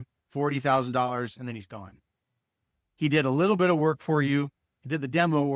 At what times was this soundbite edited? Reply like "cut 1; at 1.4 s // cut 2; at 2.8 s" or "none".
cut 1; at 2.7 s